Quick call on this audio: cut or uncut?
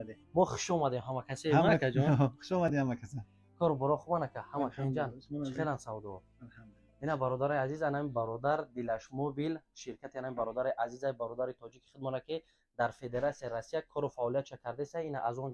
uncut